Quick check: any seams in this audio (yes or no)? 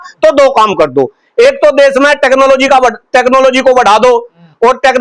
no